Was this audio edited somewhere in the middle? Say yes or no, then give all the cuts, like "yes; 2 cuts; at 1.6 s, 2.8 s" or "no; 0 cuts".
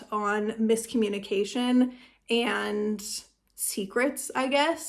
no; 0 cuts